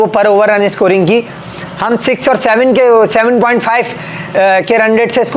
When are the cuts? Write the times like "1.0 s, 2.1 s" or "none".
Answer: none